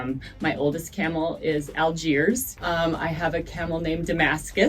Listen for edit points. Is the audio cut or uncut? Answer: cut